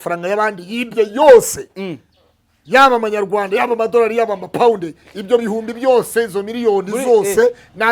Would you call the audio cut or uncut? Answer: uncut